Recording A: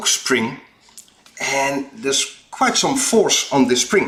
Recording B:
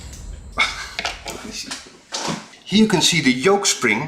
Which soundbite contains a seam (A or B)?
B